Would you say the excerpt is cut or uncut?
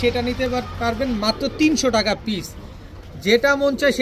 uncut